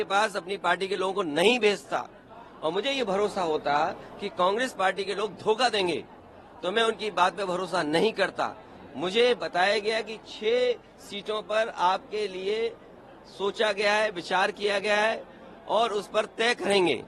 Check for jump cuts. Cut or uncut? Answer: uncut